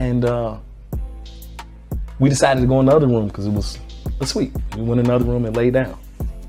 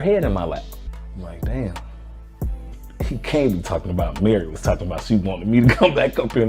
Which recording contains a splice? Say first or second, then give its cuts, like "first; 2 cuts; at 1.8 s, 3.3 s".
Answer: second; 2 cuts; at 1.0 s, 2.7 s